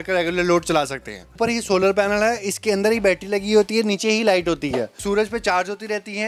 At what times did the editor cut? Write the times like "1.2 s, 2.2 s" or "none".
1.4 s, 5.0 s